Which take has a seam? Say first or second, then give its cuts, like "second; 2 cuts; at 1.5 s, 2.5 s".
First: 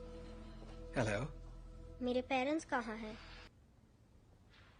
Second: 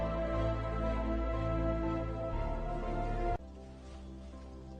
first; 1 cut; at 3.5 s